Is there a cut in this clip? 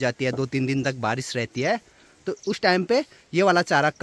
no; 0 cuts

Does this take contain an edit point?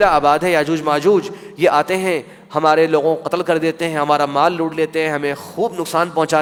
no; 0 cuts

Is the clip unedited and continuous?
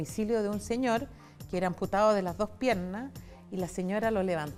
yes; 0 cuts

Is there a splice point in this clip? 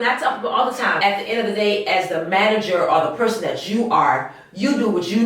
yes; 1 cut; at 1.0 s

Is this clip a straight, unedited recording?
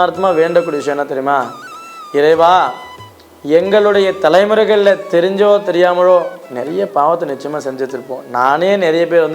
yes; 0 cuts

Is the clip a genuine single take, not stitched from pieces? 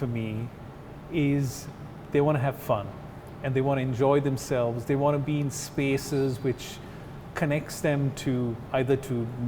yes; 0 cuts

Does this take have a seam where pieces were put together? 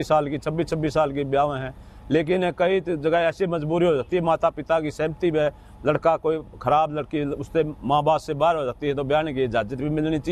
no; 0 cuts

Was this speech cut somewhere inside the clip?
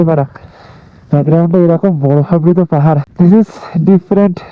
yes; 1 cut; at 3.1 s

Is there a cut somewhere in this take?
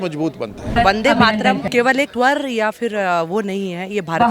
yes; 2 cuts; at 0.7 s, 2.0 s

